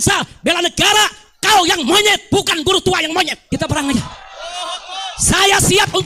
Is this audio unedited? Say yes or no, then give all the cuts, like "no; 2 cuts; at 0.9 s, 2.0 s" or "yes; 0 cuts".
no; 1 cut; at 3.4 s